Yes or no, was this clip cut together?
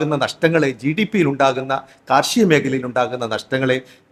no